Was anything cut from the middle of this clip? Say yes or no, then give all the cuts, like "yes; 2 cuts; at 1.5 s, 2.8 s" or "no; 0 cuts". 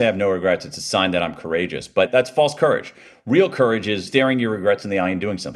yes; 2 cuts; at 2.1 s, 4.0 s